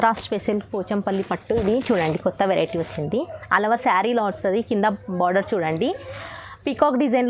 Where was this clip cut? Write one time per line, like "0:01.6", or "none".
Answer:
none